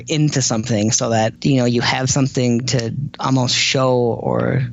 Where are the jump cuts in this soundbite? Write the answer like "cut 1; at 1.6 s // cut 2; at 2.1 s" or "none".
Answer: cut 1; at 1.4 s // cut 2; at 3.1 s